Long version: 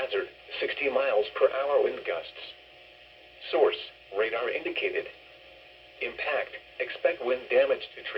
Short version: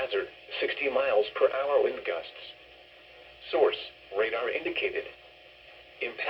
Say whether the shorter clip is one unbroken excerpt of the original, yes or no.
yes